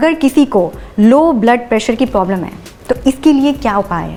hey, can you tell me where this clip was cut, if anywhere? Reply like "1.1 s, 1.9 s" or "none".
none

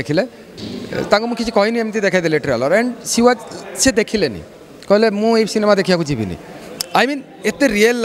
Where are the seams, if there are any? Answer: none

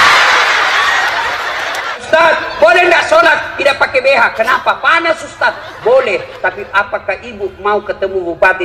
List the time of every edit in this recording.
2.0 s

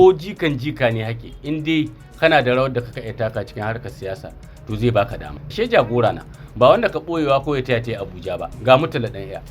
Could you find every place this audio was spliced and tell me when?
5.4 s, 8.4 s

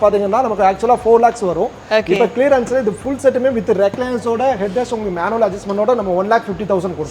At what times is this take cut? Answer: none

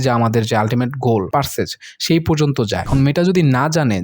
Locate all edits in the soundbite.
1.3 s, 2.9 s

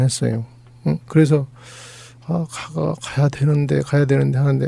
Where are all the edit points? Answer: none

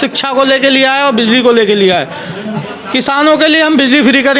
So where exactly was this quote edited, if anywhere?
2.5 s

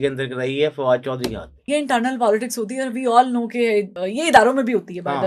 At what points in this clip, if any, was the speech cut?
1.6 s, 4.0 s

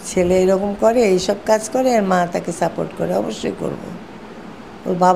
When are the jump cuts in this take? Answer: none

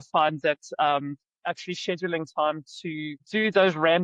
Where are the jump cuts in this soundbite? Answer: 3.1 s

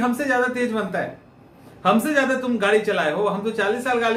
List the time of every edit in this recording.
none

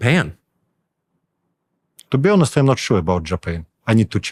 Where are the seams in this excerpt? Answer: none

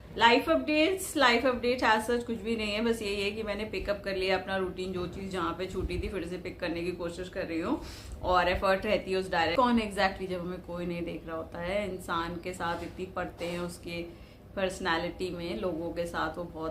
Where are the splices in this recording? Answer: 9.5 s

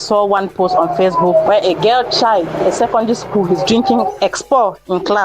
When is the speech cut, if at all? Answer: 1.5 s

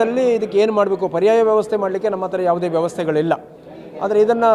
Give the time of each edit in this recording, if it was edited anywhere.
none

